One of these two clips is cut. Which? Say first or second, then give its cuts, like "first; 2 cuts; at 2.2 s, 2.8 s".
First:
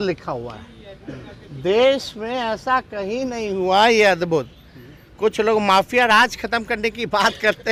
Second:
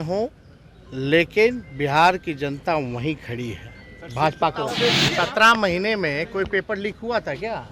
second; 1 cut; at 5.0 s